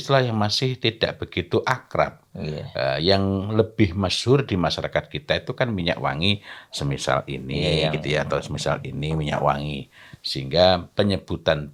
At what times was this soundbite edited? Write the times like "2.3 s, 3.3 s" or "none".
none